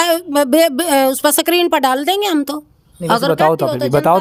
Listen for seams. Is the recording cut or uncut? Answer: uncut